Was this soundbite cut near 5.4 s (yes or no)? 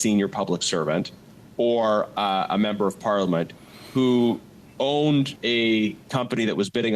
yes